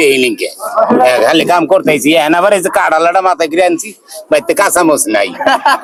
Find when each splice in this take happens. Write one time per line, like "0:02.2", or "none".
none

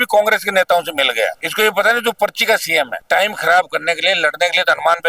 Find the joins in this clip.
0:01.4
0:03.0

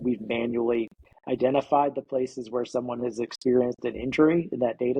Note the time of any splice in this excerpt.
none

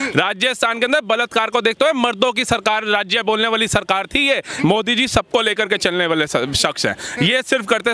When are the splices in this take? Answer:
0:04.5

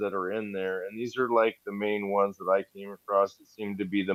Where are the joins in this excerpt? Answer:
none

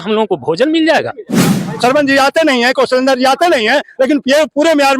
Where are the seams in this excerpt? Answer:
0:01.7

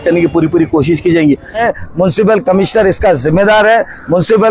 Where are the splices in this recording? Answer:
0:01.6

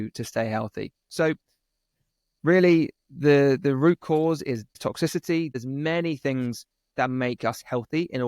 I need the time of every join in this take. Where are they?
0:04.7
0:05.5

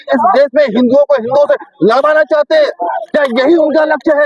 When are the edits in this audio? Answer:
none

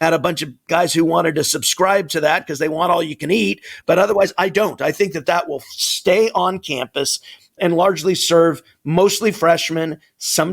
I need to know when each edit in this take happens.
0:03.7

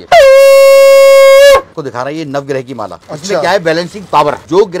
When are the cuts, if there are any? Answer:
0:01.7

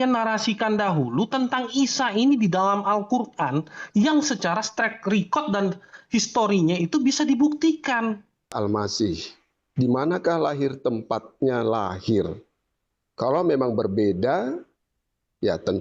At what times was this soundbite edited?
0:08.5

